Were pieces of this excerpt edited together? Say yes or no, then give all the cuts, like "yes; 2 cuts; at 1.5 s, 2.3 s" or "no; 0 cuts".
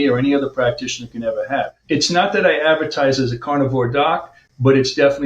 yes; 1 cut; at 1.8 s